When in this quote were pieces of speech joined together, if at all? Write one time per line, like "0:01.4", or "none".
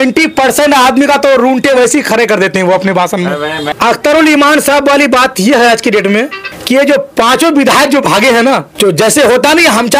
0:03.6